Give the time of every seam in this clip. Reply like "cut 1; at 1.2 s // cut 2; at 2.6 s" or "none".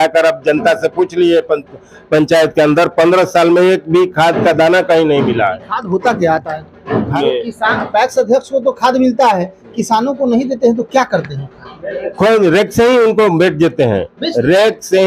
cut 1; at 7.2 s